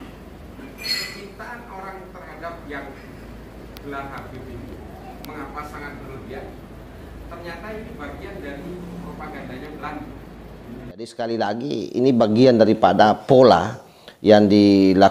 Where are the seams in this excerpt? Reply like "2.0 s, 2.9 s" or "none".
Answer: 11.1 s